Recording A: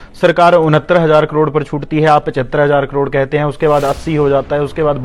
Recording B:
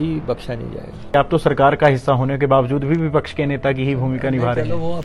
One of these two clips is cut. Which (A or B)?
B